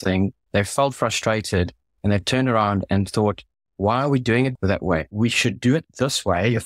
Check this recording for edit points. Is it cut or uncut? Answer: cut